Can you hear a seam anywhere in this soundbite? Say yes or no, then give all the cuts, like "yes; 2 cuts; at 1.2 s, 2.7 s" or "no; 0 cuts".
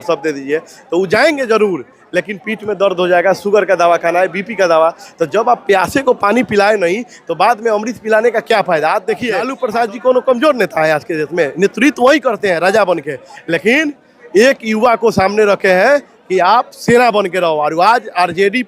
yes; 1 cut; at 9.5 s